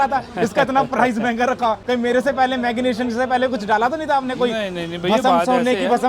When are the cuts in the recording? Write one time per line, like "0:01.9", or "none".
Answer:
none